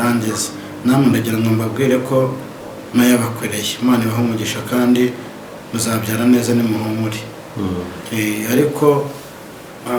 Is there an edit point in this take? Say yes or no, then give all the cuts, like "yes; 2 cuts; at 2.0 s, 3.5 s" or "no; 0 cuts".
no; 0 cuts